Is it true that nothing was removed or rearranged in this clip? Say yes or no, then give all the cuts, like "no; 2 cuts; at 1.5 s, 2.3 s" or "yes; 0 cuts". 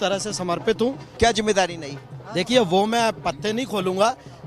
no; 1 cut; at 1.1 s